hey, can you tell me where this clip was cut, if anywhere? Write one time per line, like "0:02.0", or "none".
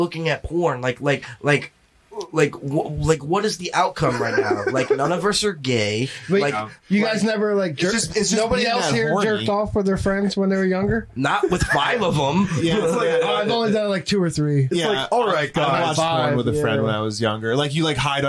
none